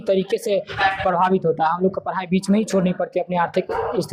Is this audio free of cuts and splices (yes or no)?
yes